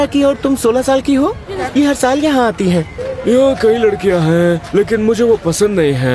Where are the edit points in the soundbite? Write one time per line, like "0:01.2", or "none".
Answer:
0:01.5
0:03.0